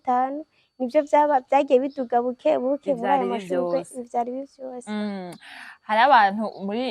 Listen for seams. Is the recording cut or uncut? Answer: uncut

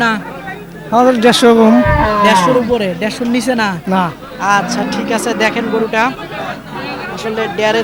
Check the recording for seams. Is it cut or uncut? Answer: uncut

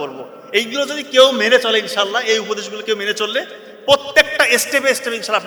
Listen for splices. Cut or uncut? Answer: uncut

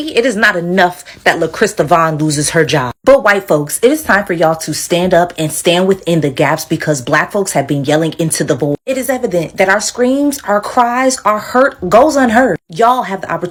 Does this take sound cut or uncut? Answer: uncut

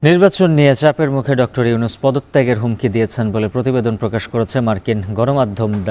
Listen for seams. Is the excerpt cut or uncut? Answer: uncut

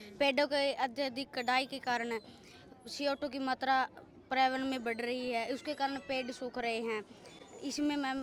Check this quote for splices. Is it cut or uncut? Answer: uncut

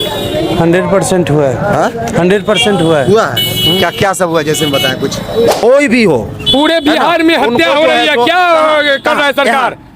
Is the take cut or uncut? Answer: cut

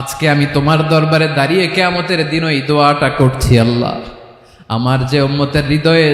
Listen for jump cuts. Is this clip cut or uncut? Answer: uncut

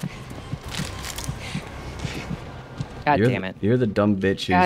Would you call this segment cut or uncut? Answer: uncut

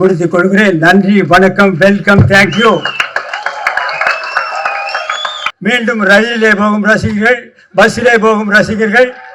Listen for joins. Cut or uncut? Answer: cut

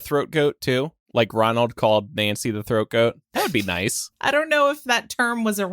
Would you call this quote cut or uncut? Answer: cut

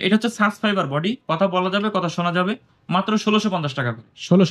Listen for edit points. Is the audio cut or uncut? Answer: uncut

